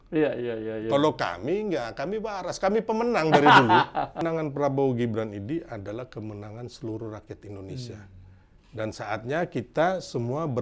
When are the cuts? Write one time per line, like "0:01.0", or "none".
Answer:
0:04.2